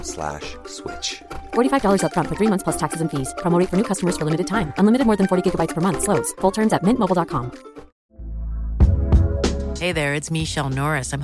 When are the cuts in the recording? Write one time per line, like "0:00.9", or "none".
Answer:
0:08.0

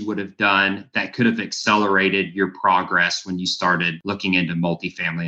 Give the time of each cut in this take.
0:04.0

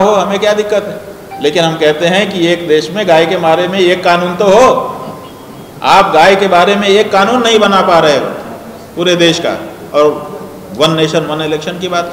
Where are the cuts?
none

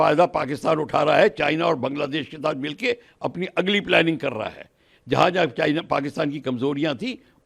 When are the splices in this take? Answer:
none

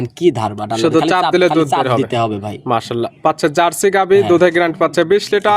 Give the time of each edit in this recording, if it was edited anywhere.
none

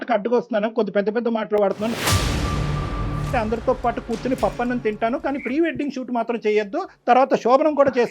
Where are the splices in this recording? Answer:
0:03.3

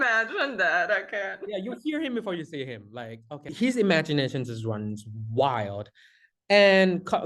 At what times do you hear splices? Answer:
0:03.4

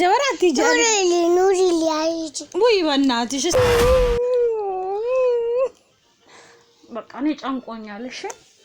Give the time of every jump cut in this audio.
0:03.5

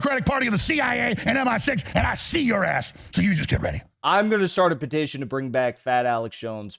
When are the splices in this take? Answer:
0:03.9

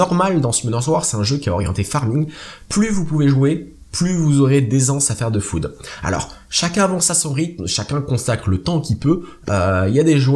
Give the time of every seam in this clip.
0:06.1

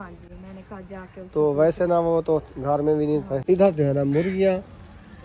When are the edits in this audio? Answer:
0:03.4

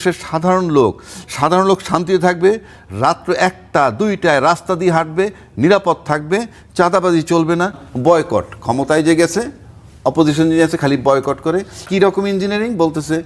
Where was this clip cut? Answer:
0:07.8
0:11.8

